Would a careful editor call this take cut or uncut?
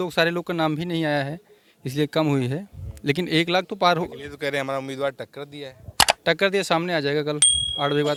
uncut